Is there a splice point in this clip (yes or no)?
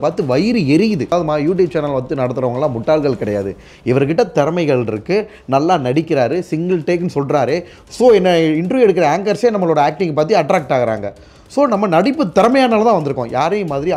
yes